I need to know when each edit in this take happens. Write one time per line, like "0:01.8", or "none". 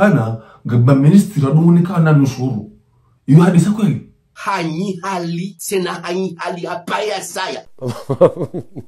none